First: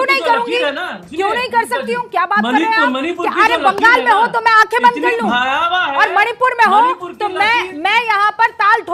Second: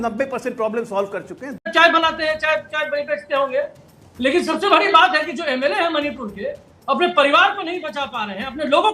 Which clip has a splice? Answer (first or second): second